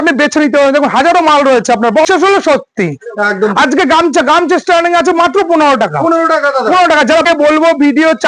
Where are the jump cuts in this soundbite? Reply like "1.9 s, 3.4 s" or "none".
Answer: 2.1 s, 7.2 s